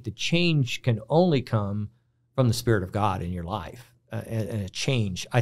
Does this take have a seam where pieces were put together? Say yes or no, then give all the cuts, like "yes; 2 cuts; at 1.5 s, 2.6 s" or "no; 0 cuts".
no; 0 cuts